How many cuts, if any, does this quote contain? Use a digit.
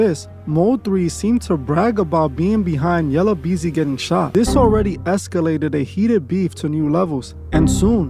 1